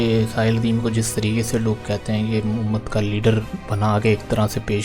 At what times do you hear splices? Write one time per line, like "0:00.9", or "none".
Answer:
0:03.6